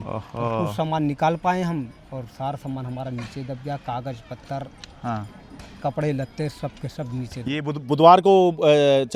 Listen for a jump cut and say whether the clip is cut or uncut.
uncut